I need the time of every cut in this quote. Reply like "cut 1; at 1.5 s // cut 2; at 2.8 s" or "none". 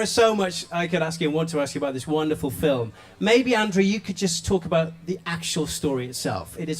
cut 1; at 5.7 s

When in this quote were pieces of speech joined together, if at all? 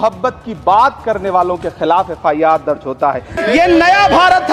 cut 1; at 3.3 s

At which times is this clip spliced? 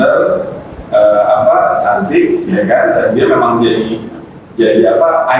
none

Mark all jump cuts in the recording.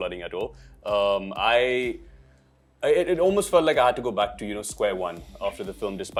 none

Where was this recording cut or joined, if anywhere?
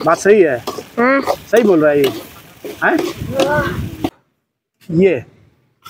cut 1; at 4.2 s

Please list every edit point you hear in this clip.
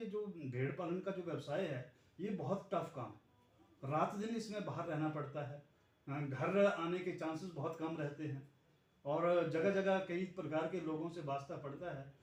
none

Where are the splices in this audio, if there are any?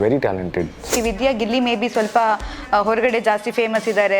cut 1; at 0.9 s

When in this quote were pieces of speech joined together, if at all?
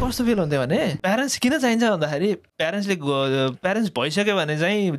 cut 1; at 1.0 s // cut 2; at 2.5 s

